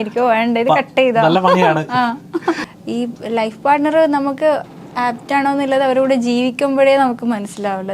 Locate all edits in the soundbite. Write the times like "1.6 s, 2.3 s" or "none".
2.6 s